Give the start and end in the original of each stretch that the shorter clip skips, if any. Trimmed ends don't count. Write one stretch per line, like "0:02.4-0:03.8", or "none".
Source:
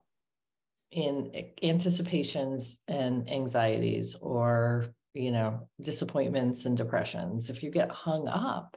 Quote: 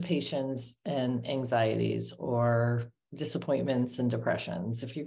0:05.0-0:05.7